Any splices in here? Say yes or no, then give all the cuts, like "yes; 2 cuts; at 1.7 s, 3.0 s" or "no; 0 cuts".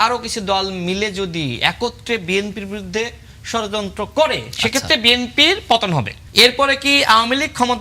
yes; 1 cut; at 6.2 s